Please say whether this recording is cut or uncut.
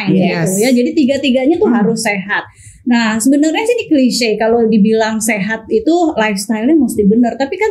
uncut